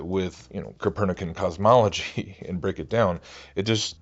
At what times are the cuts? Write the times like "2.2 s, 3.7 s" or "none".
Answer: 2.0 s